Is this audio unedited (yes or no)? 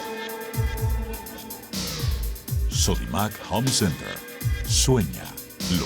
no